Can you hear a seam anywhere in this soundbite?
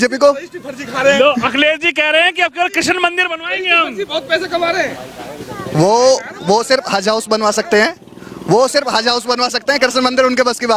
no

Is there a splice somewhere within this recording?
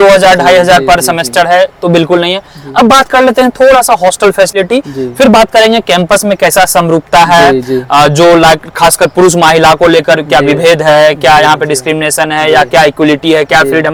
no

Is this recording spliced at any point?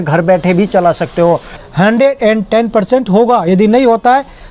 yes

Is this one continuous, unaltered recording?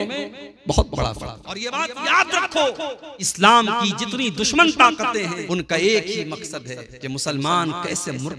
no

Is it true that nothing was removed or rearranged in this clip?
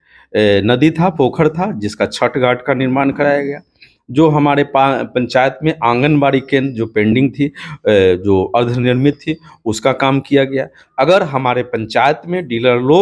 no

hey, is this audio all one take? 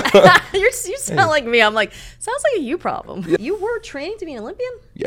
no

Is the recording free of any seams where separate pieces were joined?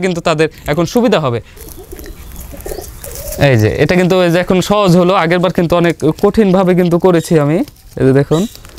no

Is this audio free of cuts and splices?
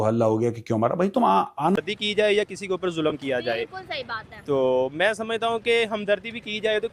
no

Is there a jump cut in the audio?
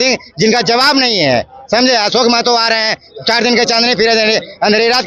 no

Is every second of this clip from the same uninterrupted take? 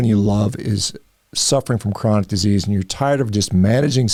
yes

